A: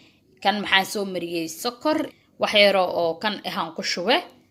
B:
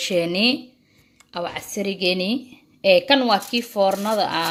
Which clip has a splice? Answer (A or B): A